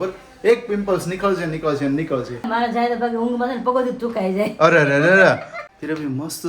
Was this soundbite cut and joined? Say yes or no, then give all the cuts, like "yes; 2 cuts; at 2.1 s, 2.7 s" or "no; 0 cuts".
yes; 2 cuts; at 2.5 s, 5.5 s